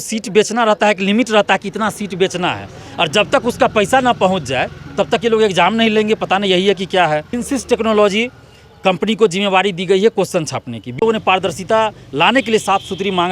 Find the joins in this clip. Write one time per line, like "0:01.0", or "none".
0:07.4
0:11.0